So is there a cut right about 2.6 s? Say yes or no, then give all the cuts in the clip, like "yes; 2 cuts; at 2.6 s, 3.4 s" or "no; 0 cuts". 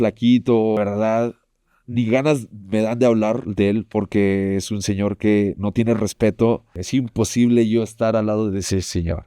no; 2 cuts; at 0.8 s, 6.8 s